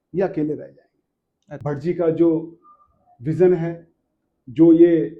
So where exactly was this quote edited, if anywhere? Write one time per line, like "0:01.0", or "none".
0:01.5